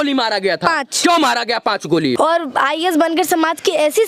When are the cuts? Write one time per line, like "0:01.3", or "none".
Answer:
0:02.2